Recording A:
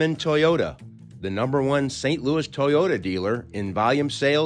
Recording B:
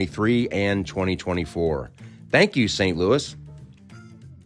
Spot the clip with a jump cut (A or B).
B